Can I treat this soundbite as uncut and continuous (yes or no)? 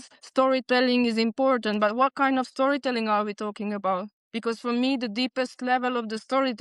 yes